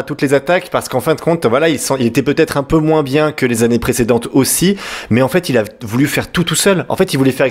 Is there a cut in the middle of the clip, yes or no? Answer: no